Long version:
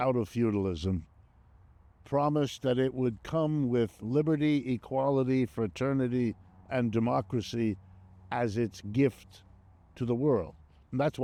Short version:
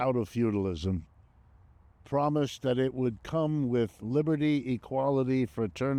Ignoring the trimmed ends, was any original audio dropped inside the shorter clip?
no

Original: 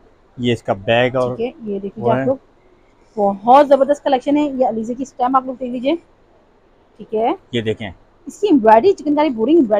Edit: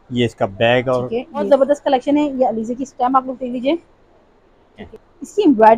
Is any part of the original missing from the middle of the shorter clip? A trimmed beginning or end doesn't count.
yes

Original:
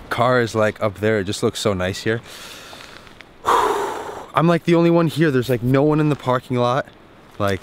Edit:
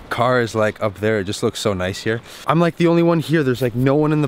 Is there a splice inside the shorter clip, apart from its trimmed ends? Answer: yes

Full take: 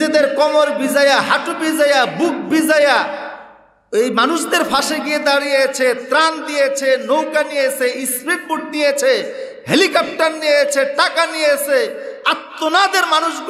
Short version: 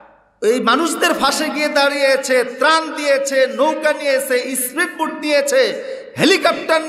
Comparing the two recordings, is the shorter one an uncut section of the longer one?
yes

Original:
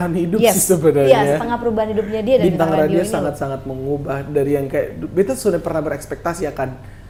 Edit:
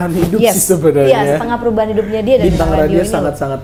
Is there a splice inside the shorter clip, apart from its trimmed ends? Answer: no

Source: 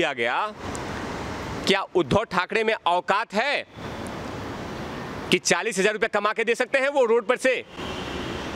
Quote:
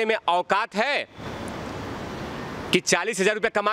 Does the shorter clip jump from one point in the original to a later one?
no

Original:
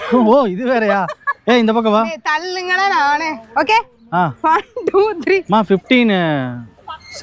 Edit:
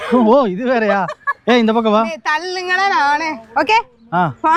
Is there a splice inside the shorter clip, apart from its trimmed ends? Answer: no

